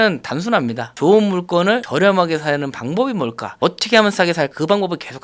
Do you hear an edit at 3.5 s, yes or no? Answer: yes